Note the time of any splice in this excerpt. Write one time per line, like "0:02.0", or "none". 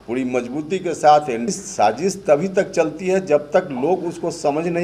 0:01.5